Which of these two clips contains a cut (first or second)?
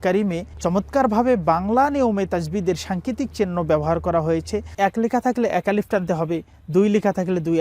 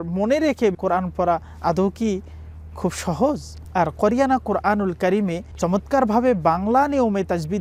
first